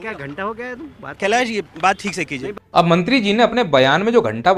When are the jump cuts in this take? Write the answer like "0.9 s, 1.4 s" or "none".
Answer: 2.6 s